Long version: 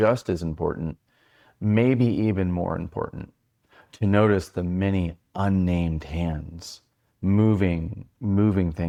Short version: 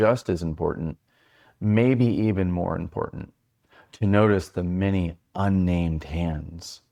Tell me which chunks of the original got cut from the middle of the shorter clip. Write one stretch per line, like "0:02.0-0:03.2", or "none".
none

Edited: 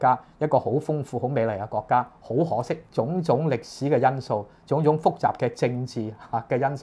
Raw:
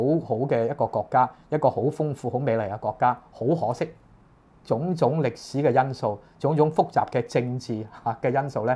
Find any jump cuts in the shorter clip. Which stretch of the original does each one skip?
0:04.0-0:04.6

